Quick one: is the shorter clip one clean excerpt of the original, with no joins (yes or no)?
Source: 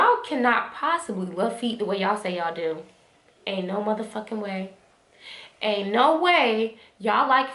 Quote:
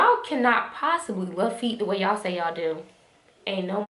yes